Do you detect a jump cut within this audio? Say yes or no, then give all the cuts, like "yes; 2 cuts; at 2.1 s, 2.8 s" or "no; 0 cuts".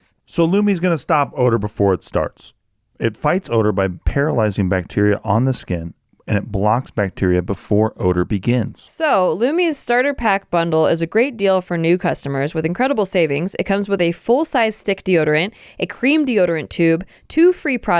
yes; 1 cut; at 8.7 s